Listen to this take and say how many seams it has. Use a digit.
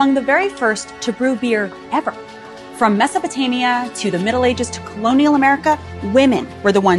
1